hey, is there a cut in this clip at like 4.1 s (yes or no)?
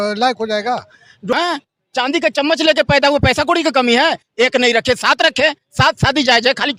no